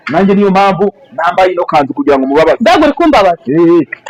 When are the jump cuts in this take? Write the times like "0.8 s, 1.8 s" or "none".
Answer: none